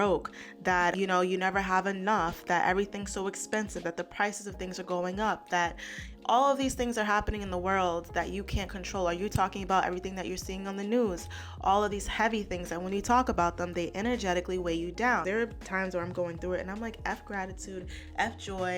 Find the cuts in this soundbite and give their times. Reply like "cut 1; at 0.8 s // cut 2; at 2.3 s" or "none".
cut 1; at 0.9 s // cut 2; at 15.2 s